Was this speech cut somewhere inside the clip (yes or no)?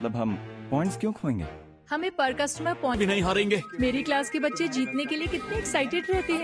yes